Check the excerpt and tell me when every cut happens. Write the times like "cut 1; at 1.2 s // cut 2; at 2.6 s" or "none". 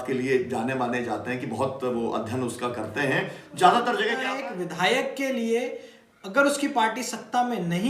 cut 1; at 4.3 s